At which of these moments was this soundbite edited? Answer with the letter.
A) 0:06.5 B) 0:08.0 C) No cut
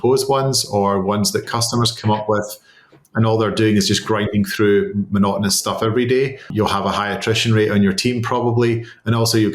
A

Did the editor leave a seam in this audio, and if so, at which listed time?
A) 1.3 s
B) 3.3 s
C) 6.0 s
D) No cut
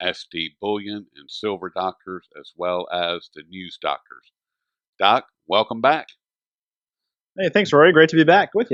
D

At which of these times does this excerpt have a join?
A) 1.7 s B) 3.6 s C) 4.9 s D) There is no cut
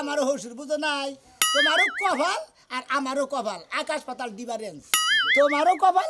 D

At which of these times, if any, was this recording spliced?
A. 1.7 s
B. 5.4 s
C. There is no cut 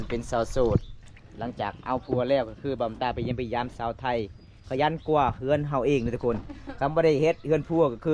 C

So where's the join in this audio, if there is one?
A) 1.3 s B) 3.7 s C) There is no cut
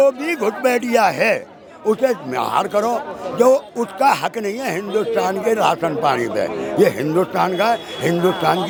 C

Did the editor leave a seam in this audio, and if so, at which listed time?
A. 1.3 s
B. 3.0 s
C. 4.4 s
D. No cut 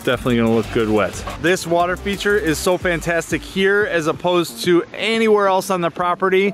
A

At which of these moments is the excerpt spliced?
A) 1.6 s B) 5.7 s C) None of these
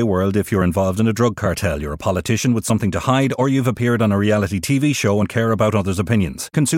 C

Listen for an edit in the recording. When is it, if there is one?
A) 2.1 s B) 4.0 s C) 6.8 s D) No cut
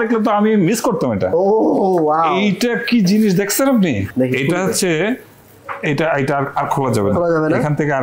B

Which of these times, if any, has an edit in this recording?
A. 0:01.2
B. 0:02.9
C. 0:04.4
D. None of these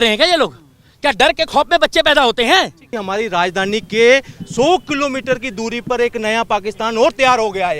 B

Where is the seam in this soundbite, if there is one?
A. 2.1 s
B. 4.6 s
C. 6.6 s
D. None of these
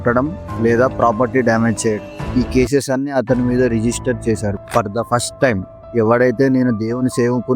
B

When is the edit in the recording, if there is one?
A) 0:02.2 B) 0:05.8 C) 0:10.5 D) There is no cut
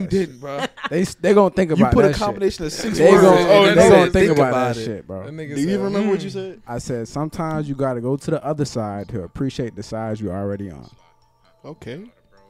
D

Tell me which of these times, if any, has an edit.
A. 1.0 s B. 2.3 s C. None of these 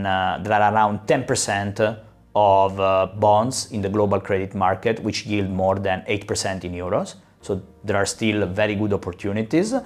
C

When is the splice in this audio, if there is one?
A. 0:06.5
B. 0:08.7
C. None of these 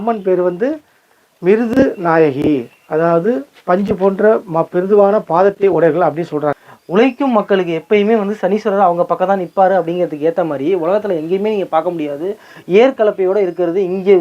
A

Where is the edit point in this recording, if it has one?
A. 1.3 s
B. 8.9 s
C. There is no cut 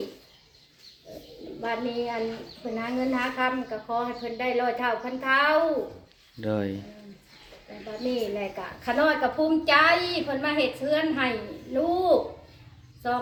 C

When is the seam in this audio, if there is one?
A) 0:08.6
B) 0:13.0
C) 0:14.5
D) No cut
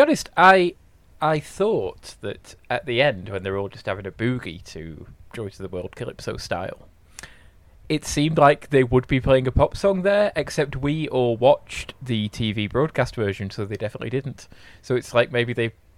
D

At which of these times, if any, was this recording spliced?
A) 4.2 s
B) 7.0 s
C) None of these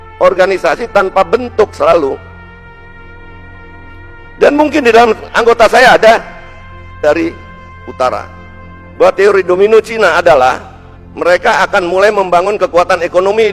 B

